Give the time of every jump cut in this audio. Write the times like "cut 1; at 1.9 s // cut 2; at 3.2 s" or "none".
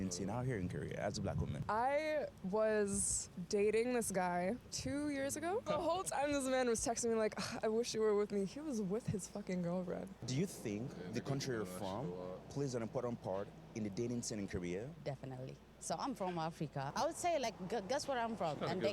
cut 1; at 1.6 s // cut 2; at 5.6 s // cut 3; at 10.1 s // cut 4; at 16.9 s